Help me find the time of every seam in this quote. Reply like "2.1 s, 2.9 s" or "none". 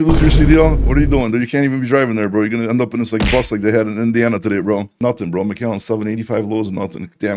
4.9 s